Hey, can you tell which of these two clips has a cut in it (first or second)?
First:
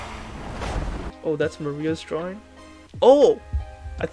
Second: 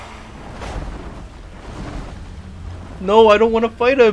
first